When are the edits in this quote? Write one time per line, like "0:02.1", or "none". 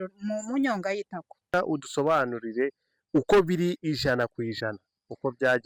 0:01.5